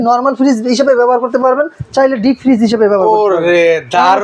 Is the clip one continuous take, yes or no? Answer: yes